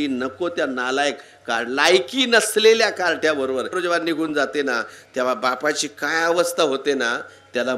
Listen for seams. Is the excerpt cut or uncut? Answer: cut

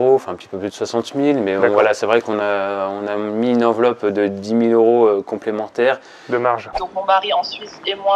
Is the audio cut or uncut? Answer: cut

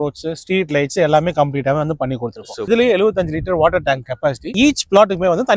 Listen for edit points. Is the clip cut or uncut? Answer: cut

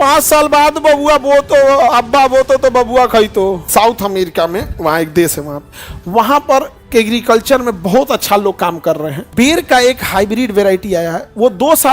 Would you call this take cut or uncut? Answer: cut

